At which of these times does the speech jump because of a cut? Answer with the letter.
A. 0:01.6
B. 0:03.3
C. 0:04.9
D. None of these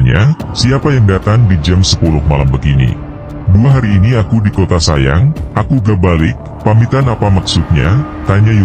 B